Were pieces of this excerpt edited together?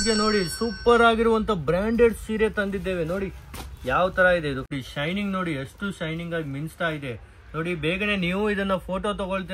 yes; 1 cut; at 4.7 s

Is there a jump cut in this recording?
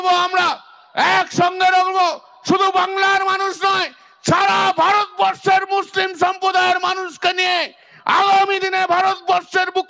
no; 0 cuts

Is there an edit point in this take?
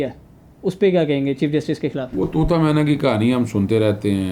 no; 0 cuts

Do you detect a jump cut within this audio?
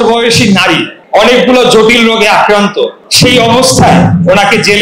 yes; 2 cuts; at 0.9 s, 3.0 s

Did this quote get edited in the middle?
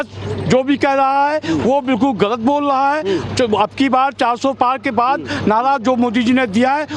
no; 0 cuts

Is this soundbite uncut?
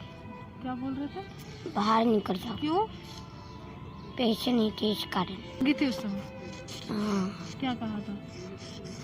no; 1 cut; at 5.6 s

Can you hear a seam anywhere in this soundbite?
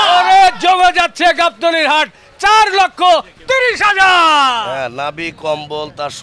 yes; 1 cut; at 4.6 s

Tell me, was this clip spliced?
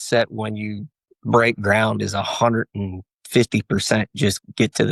no; 0 cuts

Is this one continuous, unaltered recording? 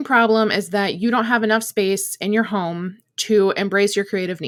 yes; 0 cuts

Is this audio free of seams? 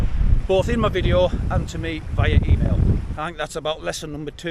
no; 1 cut; at 3.0 s

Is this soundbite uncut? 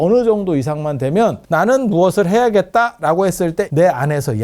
no; 2 cuts; at 1.4 s, 3.7 s

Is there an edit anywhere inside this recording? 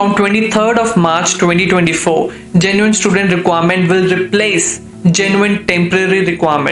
no; 0 cuts

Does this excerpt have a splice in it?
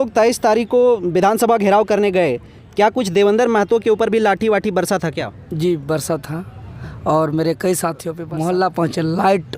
yes; 1 cut; at 8.1 s

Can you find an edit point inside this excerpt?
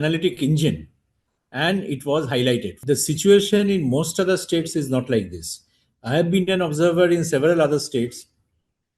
yes; 1 cut; at 2.8 s

